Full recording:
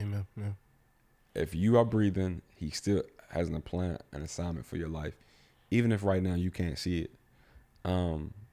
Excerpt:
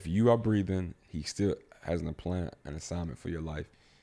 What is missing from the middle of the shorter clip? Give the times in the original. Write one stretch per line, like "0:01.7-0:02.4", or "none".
none